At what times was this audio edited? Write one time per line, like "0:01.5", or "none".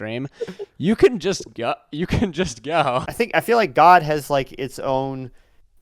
0:03.1